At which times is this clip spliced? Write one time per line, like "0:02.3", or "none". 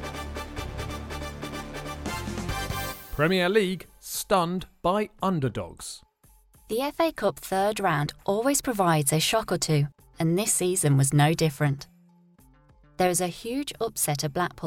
0:03.0